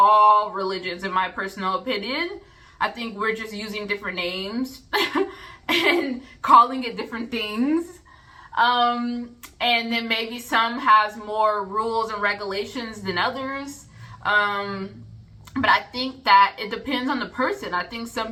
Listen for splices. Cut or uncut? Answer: uncut